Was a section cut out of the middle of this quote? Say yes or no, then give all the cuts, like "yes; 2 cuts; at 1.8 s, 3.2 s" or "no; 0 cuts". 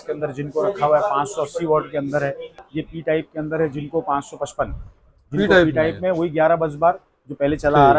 yes; 1 cut; at 2.6 s